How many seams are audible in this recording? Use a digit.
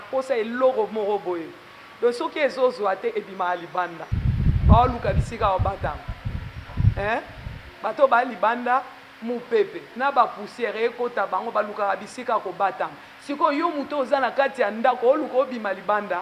1